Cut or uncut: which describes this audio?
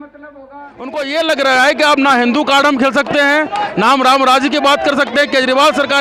cut